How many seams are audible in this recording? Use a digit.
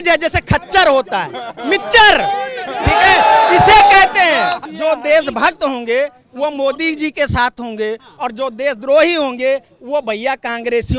1